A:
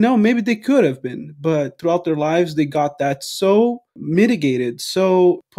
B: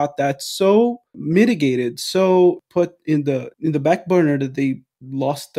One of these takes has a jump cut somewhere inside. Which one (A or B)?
A